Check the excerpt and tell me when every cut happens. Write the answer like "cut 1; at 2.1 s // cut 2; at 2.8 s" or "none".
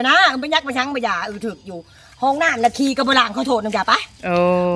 none

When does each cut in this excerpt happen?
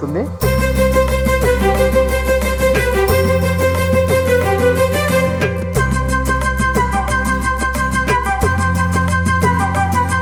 none

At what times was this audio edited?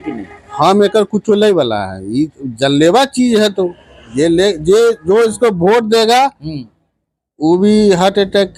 none

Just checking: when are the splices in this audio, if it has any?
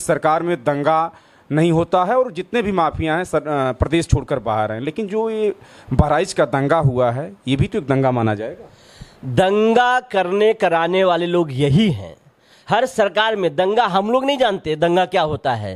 none

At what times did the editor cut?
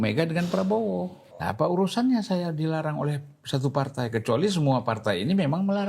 cut 1; at 1.2 s

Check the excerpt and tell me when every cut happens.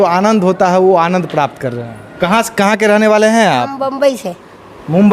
cut 1; at 2.0 s

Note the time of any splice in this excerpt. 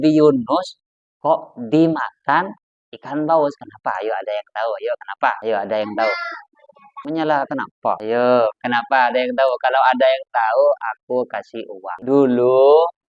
cut 1; at 12.0 s

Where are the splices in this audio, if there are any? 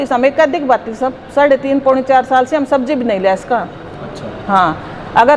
none

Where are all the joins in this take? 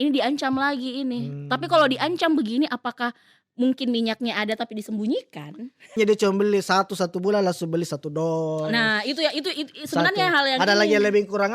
cut 1; at 6.0 s

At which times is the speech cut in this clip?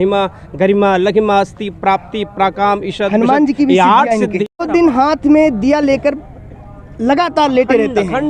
cut 1; at 4.6 s

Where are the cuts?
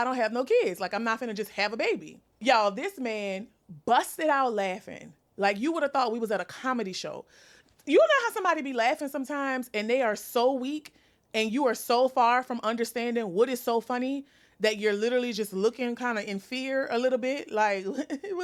none

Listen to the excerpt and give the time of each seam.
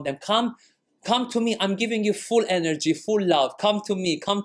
none

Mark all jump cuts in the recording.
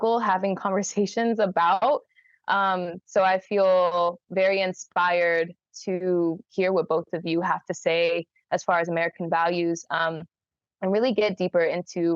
none

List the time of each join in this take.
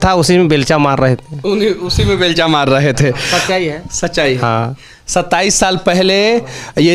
none

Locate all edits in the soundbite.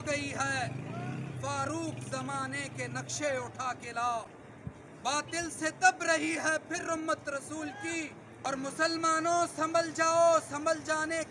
cut 1; at 8.5 s

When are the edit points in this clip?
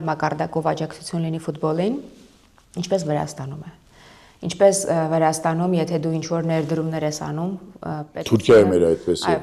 none

